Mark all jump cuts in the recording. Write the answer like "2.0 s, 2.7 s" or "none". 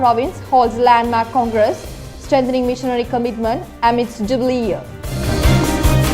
5.2 s